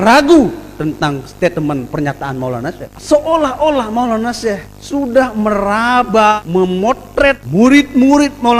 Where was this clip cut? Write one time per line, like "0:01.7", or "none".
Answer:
0:02.9
0:04.7
0:06.4
0:07.4